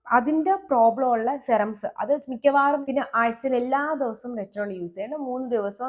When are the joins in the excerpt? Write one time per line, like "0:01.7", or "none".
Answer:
0:02.8